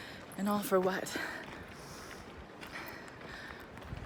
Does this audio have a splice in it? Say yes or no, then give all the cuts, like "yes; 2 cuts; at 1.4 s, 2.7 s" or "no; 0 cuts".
no; 0 cuts